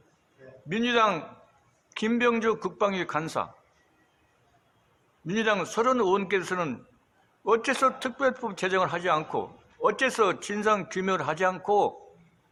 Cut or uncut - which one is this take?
uncut